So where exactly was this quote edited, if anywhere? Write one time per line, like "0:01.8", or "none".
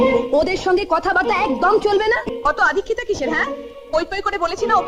0:02.2